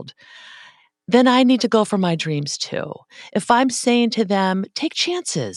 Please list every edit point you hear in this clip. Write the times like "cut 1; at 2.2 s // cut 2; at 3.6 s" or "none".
none